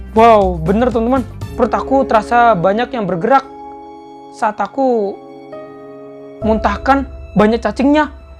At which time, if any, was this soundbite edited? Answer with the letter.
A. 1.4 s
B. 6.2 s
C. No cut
A